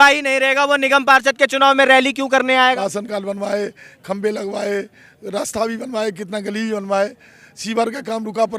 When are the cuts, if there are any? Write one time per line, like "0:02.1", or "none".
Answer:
0:02.8